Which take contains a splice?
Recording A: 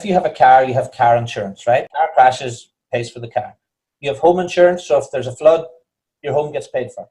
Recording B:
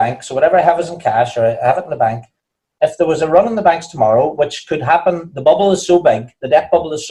A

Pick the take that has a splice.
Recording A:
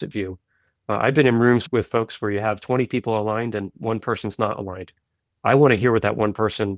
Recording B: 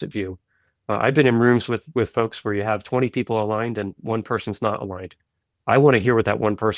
A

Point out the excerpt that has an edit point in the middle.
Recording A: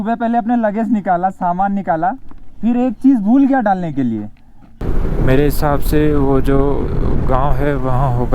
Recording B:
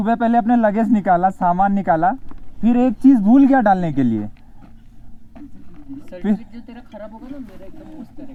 A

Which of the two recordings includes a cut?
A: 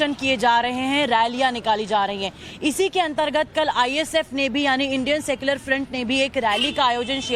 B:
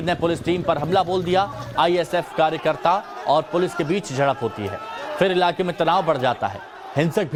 A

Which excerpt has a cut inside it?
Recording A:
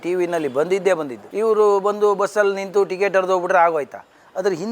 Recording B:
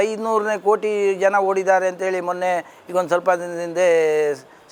A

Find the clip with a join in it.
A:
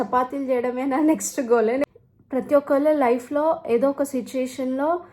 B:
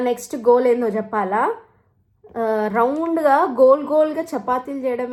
A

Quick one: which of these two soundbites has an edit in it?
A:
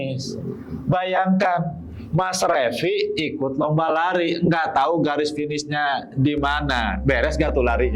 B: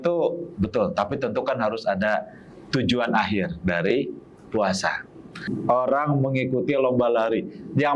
B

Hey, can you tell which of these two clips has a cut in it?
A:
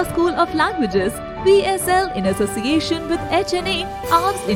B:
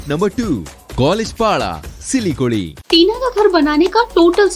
B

